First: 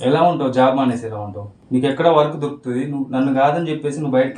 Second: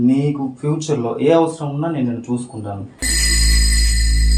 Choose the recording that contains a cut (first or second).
second